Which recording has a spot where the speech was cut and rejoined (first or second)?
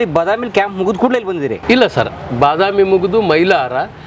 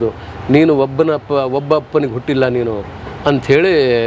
first